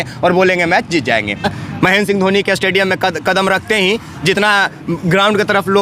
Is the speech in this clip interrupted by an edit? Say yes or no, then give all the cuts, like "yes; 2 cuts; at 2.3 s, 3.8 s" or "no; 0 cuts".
yes; 1 cut; at 1.5 s